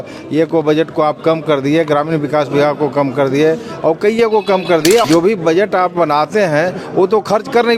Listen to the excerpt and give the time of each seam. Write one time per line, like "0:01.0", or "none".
0:05.0

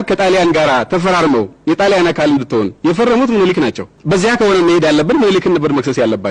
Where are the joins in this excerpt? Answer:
0:03.9

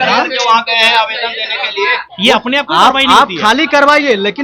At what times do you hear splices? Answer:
0:02.1

